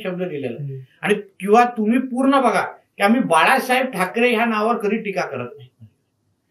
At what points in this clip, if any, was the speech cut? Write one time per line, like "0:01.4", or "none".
none